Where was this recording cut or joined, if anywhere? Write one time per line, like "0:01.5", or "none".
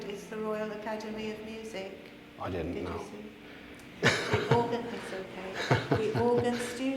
none

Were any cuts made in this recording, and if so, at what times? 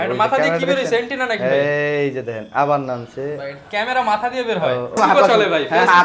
0:05.0

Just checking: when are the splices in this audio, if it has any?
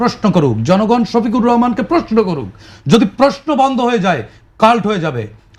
none

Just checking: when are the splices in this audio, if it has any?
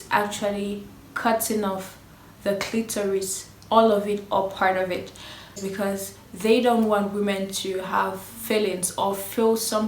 0:05.6

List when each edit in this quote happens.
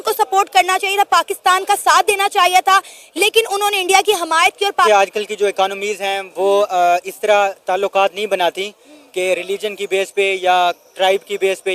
0:04.9

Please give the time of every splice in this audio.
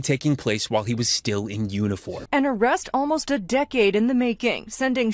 none

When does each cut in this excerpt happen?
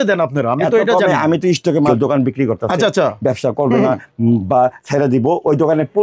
0:01.9

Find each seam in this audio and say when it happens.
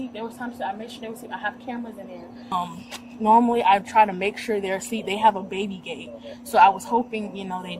0:02.5

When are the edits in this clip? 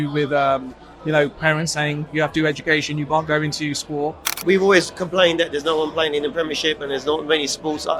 0:04.3

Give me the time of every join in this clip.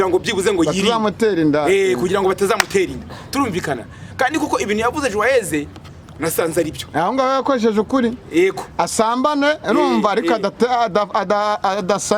none

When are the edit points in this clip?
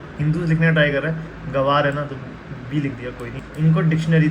0:03.4

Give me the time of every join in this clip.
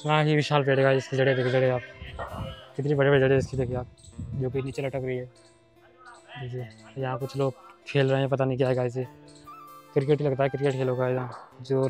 none

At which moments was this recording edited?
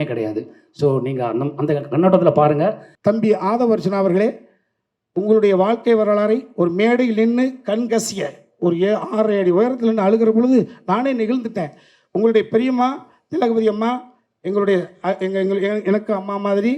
0:02.9

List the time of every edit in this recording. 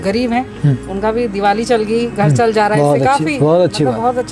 none

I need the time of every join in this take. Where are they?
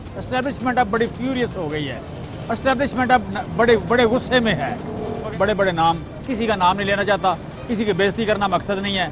0:05.1

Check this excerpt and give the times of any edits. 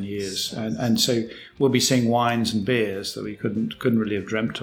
none

